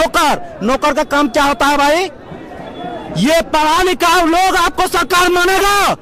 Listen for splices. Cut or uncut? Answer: uncut